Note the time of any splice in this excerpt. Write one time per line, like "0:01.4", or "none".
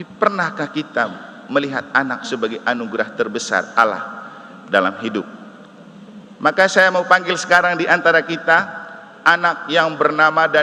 none